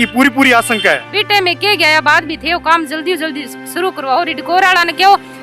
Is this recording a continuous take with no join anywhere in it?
no; 1 cut; at 1.1 s

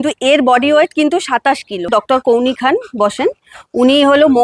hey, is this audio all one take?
no; 1 cut; at 1.9 s

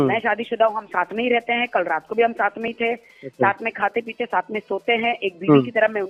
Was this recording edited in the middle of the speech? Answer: no; 0 cuts

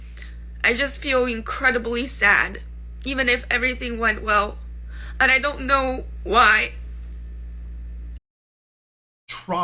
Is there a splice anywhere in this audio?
no; 0 cuts

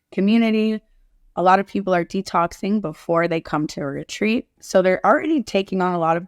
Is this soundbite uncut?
no; 1 cut; at 4.6 s

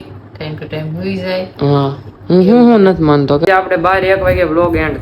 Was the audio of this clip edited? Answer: yes; 1 cut; at 3.4 s

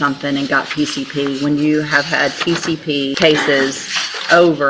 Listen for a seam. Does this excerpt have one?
yes; 1 cut; at 3.2 s

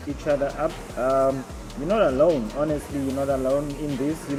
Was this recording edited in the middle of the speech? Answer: no; 0 cuts

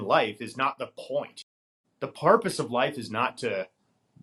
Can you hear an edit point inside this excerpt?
no; 0 cuts

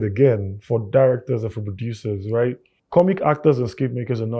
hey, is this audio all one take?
no; 1 cut; at 2.7 s

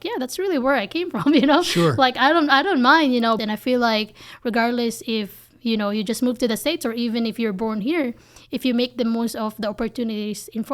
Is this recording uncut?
no; 1 cut; at 3.4 s

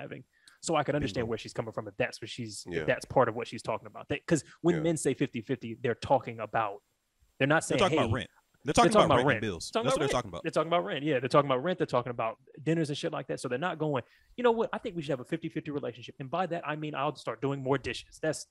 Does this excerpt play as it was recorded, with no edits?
yes; 0 cuts

